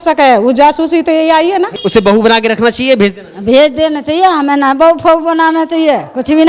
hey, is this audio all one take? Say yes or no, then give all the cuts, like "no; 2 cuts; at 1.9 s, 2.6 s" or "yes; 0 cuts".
no; 1 cut; at 1.8 s